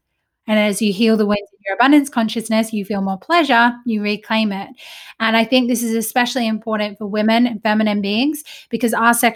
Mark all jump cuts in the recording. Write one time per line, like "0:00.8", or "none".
none